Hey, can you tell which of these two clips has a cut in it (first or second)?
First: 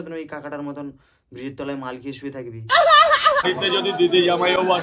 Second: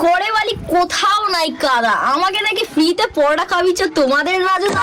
first